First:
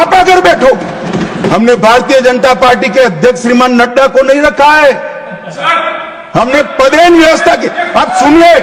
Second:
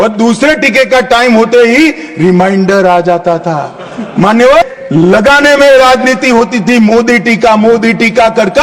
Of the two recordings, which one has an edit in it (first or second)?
second